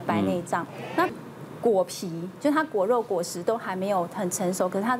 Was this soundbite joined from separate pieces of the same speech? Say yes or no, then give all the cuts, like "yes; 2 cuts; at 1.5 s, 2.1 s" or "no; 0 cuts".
yes; 1 cut; at 1.1 s